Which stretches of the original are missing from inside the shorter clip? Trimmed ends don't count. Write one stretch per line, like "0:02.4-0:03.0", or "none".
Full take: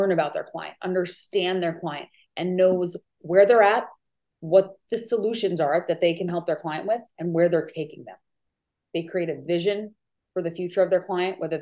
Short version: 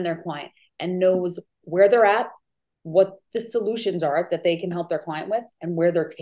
none